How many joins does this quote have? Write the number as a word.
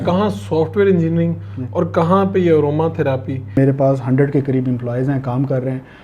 one